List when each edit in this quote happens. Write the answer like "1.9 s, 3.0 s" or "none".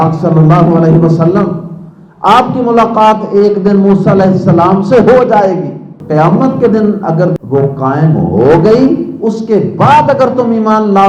6.0 s